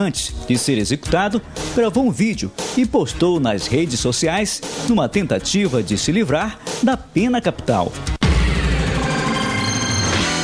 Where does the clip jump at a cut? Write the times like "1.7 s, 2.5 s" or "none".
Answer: 8.3 s